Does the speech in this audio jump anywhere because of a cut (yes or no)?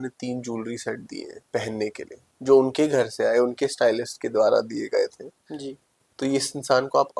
yes